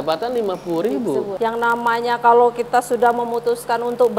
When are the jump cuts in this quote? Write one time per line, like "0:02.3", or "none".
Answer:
0:01.3